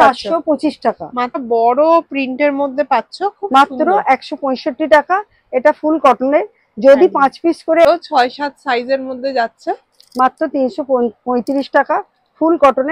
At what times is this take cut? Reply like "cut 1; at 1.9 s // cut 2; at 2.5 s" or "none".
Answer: cut 1; at 1.4 s // cut 2; at 7.9 s